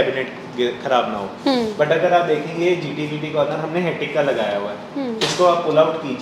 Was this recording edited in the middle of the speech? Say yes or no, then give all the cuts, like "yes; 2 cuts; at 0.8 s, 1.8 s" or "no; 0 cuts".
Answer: no; 0 cuts